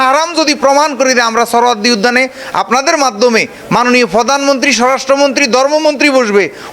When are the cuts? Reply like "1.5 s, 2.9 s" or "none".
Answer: none